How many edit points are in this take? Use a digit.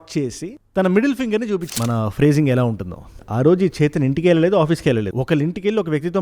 1